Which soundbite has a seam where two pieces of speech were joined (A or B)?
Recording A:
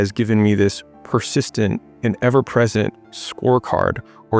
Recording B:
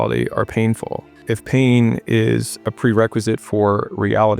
B